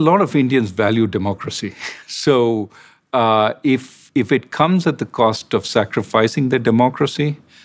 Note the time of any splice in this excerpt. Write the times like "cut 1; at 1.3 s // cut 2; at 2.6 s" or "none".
none

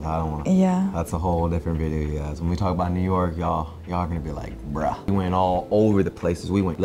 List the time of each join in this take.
cut 1; at 5.1 s

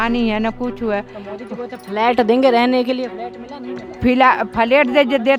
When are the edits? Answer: none

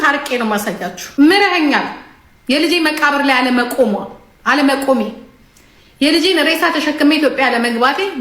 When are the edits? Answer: cut 1; at 0.9 s

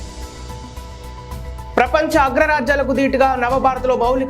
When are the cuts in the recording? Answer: cut 1; at 1.6 s

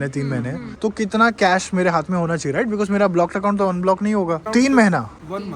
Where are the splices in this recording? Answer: cut 1; at 4.4 s

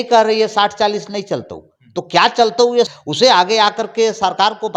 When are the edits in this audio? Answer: cut 1; at 2.9 s

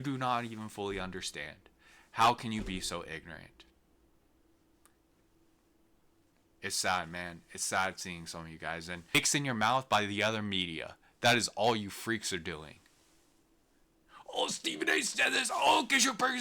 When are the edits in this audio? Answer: cut 1; at 9.1 s

